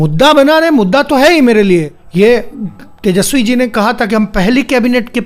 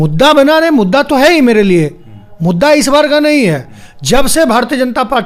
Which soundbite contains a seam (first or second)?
first